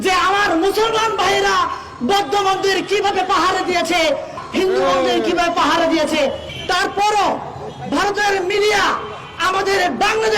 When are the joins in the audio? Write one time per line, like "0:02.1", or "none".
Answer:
0:04.4
0:06.5